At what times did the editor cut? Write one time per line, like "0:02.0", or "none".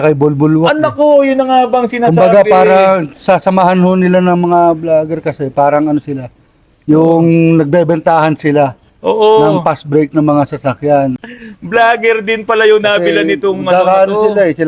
0:11.2